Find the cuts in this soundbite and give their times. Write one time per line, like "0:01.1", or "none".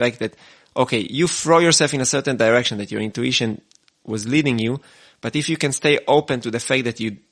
none